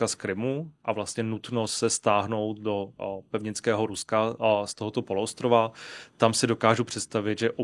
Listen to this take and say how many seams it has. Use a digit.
0